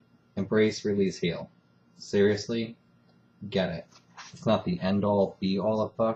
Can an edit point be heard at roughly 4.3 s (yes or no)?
no